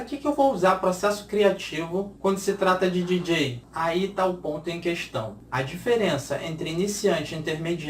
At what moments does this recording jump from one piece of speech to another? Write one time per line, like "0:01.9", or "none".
0:02.1
0:03.6
0:05.4